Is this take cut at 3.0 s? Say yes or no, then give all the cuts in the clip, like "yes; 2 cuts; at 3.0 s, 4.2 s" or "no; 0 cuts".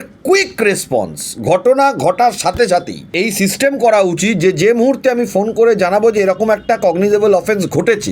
yes; 1 cut; at 3.0 s